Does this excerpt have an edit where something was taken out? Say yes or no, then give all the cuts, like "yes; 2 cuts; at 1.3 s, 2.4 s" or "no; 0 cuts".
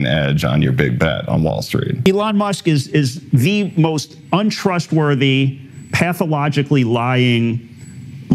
yes; 1 cut; at 2.0 s